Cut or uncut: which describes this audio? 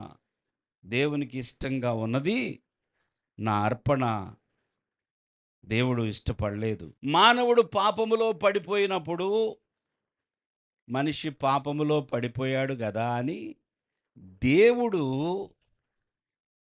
cut